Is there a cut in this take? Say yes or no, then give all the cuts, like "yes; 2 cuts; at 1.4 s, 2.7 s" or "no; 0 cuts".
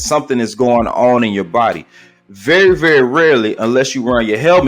no; 0 cuts